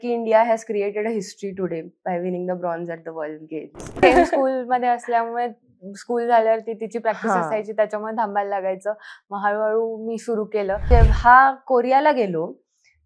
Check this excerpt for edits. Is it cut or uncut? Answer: cut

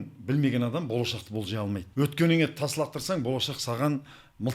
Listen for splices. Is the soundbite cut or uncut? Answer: cut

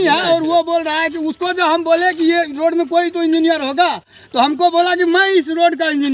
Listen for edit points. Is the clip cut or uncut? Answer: uncut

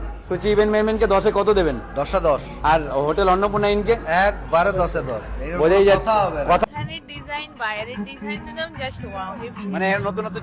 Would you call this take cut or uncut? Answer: cut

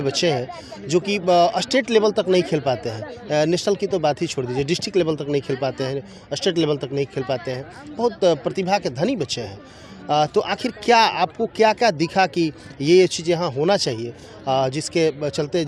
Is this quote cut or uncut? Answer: uncut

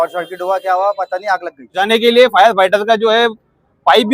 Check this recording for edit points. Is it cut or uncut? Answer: cut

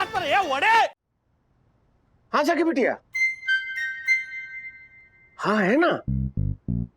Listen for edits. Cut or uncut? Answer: cut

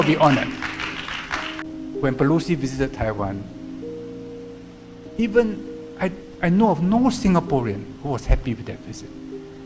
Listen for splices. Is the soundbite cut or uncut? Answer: cut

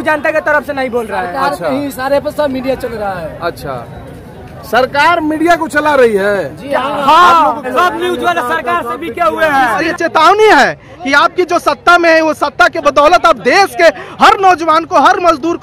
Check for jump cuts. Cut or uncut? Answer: cut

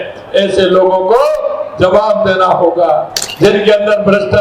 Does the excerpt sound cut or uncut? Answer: cut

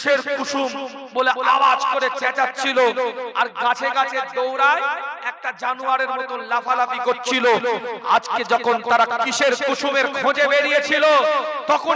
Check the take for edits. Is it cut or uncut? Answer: uncut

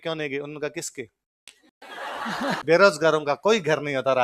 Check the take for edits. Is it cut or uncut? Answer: cut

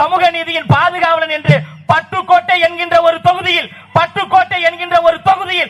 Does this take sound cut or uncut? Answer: uncut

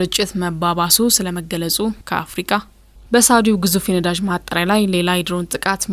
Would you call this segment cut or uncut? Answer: cut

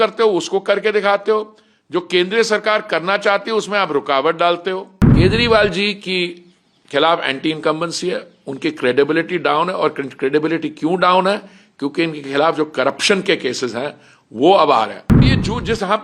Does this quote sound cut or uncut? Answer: cut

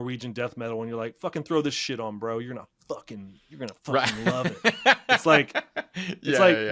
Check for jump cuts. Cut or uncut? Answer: uncut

